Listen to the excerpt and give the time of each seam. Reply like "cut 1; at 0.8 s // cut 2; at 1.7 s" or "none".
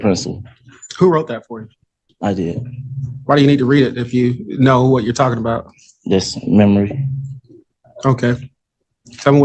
none